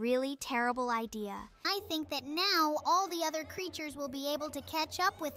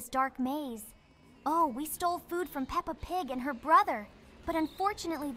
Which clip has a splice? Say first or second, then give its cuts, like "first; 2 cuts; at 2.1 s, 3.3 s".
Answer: first; 1 cut; at 1.5 s